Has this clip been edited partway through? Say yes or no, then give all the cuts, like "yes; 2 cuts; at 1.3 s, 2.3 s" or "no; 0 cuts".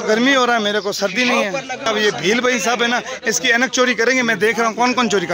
yes; 1 cut; at 1.9 s